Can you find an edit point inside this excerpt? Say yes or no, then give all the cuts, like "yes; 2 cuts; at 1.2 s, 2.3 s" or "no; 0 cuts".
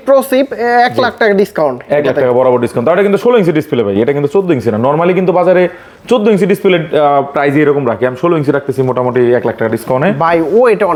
no; 0 cuts